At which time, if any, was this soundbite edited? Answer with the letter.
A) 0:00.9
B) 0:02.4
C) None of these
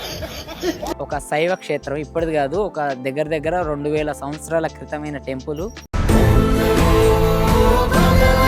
A